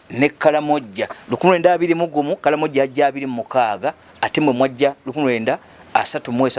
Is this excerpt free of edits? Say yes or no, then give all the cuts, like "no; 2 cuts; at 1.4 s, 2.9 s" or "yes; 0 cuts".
yes; 0 cuts